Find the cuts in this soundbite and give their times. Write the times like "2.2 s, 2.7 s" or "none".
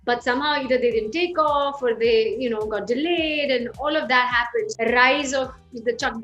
4.7 s